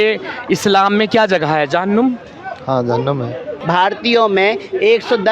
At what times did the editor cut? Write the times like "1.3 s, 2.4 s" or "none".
3.5 s

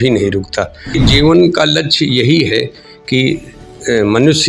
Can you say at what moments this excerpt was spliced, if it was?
0.9 s

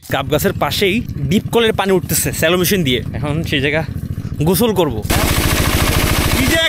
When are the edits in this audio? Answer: 1.1 s, 3.1 s, 5.1 s

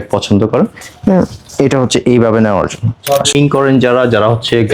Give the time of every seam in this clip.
3.3 s

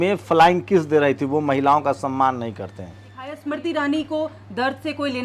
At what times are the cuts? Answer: 3.3 s

